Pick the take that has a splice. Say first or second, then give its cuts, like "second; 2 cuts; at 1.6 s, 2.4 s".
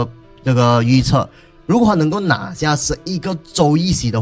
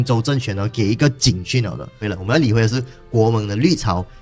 second; 1 cut; at 1.9 s